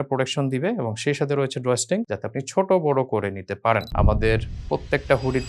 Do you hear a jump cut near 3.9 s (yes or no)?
yes